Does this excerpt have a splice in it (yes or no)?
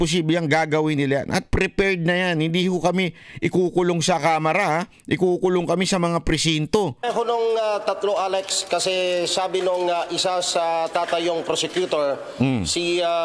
yes